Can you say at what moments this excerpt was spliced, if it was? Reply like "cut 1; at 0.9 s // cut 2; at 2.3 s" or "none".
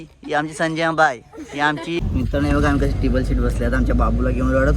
cut 1; at 2.0 s

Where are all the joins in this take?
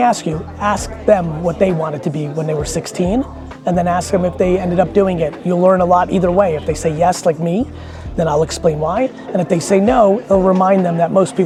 none

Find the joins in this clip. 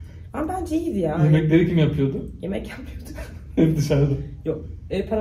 none

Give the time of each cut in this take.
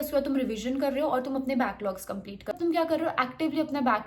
cut 1; at 2.5 s

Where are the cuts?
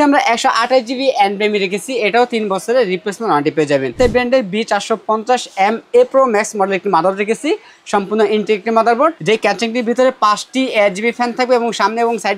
cut 1; at 3.9 s // cut 2; at 9.2 s

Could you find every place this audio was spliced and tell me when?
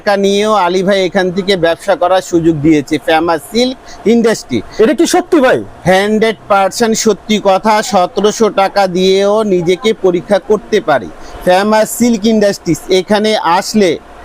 cut 1; at 11.2 s

